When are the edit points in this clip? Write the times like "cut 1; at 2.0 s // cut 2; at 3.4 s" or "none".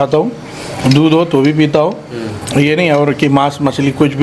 none

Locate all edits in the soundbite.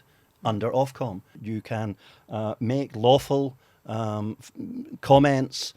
cut 1; at 1.3 s

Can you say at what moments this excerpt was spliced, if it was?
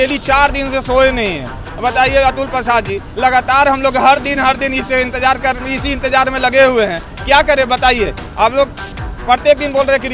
none

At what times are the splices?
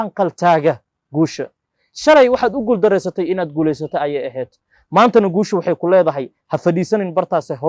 none

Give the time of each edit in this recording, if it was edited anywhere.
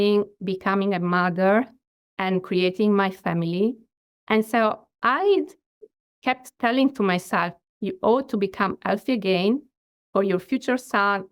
cut 1; at 7.6 s

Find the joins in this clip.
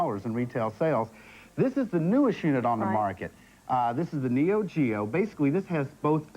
cut 1; at 2.3 s

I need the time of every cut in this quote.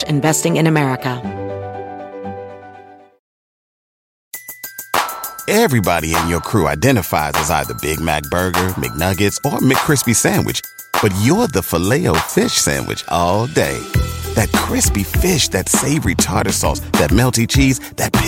cut 1; at 1.2 s

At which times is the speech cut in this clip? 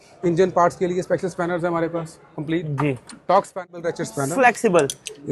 cut 1; at 3.6 s

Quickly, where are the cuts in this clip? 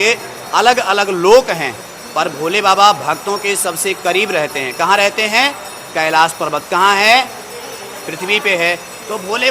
none

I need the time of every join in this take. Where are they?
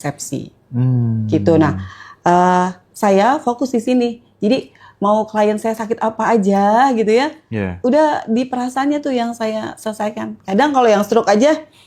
none

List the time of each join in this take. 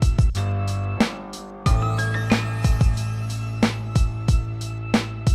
cut 1; at 1.5 s

